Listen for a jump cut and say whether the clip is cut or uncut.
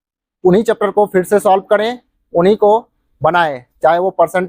uncut